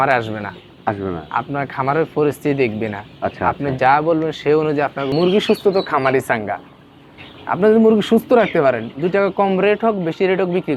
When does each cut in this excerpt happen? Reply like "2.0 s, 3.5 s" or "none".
5.1 s